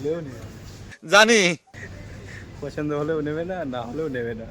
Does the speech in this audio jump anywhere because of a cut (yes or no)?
no